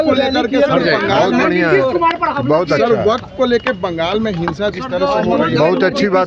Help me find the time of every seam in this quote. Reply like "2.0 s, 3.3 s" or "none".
none